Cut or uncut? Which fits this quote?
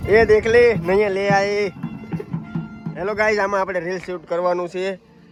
uncut